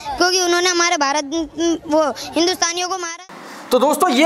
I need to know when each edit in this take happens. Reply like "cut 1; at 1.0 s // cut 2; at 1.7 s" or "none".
none